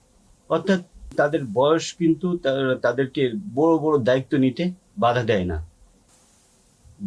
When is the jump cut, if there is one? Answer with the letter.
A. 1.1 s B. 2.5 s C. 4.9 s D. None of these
A